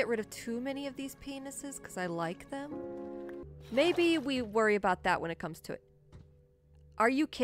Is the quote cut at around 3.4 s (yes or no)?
yes